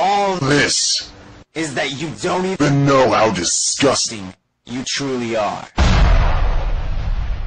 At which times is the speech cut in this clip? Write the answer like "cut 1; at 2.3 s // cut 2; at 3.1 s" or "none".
none

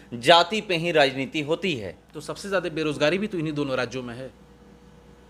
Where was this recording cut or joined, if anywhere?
none

